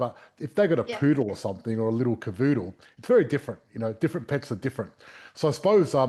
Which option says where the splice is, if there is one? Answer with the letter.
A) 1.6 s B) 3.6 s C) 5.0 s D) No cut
D